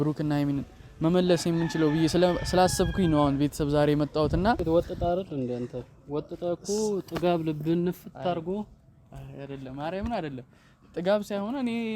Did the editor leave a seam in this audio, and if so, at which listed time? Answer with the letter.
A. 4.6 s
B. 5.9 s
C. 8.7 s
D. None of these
A